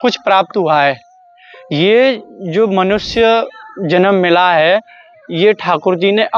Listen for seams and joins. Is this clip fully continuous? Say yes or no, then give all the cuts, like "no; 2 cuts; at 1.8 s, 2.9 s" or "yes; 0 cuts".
yes; 0 cuts